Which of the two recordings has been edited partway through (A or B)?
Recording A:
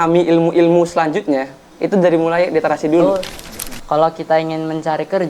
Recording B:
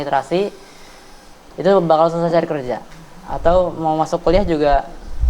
A